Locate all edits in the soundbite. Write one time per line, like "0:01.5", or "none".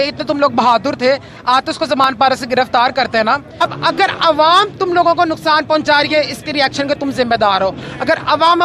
0:03.6